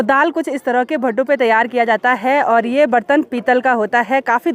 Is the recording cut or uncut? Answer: uncut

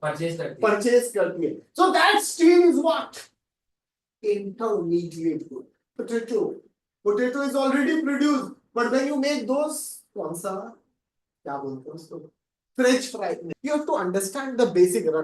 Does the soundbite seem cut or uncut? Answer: cut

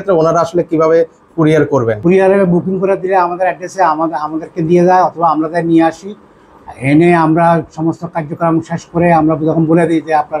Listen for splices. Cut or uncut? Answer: cut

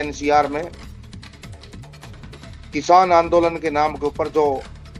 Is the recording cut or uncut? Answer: cut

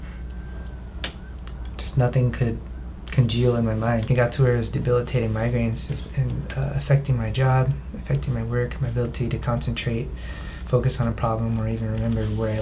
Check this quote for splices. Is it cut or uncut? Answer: cut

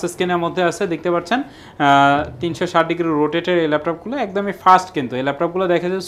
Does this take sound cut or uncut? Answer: uncut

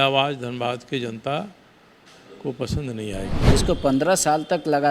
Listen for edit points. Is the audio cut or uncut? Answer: cut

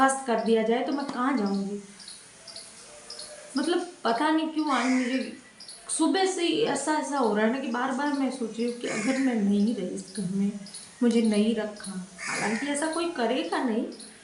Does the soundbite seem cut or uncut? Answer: uncut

